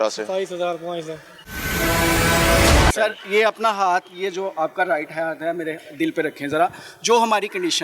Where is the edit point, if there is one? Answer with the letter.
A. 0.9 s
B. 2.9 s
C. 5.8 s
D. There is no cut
B